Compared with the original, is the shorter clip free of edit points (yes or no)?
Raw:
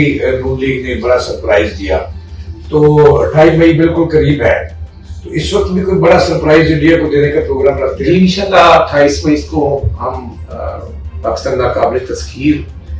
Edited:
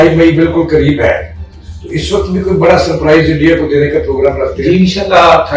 yes